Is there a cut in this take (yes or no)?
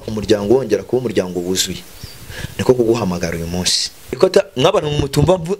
yes